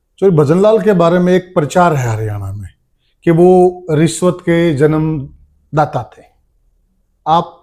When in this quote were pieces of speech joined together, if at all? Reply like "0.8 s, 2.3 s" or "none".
none